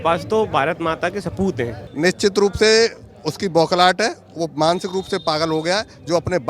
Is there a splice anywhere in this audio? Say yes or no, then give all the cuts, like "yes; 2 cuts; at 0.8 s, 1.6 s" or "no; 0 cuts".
yes; 1 cut; at 1.8 s